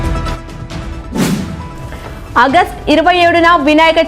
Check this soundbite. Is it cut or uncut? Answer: cut